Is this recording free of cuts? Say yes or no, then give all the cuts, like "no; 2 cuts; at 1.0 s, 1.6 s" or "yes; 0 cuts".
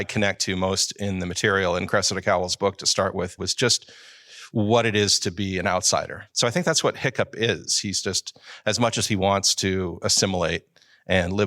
no; 2 cuts; at 3.4 s, 6.2 s